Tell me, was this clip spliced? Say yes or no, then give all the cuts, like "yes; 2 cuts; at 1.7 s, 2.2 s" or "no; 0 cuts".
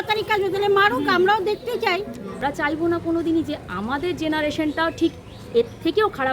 yes; 1 cut; at 2.4 s